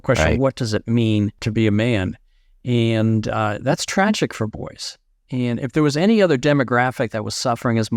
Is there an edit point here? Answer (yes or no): yes